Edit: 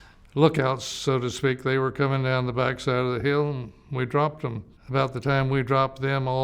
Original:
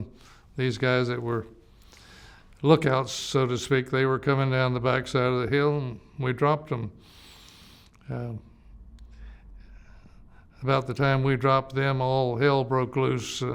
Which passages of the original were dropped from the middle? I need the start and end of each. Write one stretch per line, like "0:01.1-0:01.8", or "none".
0:07.0-0:10.4

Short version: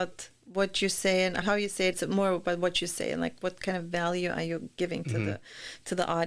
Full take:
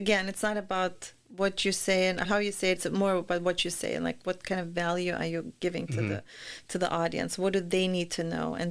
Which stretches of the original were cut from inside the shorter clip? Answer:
none

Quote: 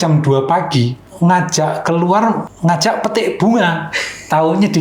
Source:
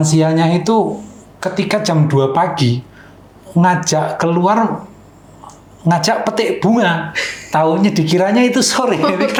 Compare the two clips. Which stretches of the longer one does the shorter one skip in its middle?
0:02.9-0:03.4
0:04.8-0:05.7

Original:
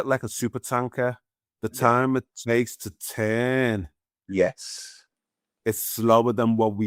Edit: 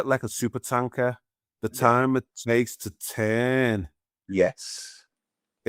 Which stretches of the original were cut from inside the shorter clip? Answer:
none

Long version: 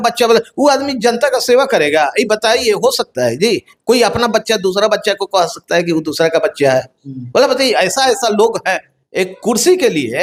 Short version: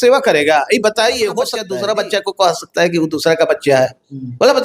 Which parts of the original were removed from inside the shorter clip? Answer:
0:03.1-0:04.5

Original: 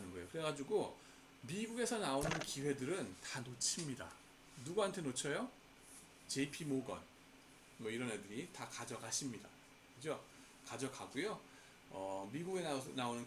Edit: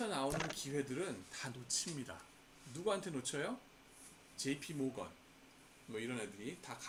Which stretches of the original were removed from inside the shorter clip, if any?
none

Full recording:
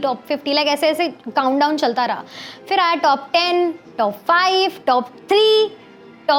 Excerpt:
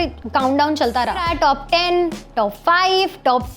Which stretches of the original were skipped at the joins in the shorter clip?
0:02.3-0:02.9

